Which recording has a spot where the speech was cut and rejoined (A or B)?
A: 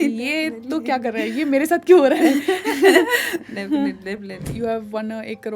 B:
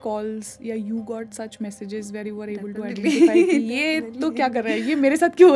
A